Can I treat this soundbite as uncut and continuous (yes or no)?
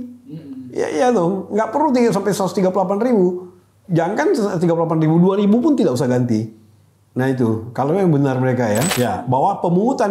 no